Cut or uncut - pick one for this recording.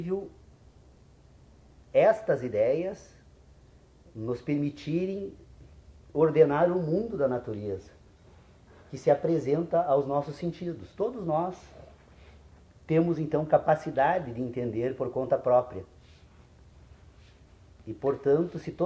cut